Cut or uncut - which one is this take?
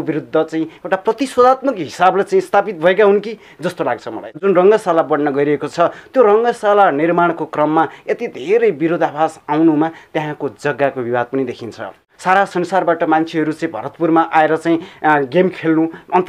cut